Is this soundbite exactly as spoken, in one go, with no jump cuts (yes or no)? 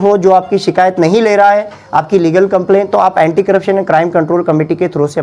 yes